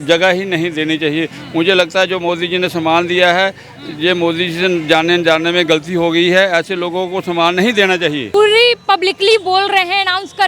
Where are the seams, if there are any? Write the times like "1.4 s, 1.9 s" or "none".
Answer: 8.3 s